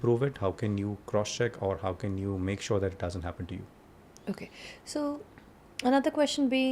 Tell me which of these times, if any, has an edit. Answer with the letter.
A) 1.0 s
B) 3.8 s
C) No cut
C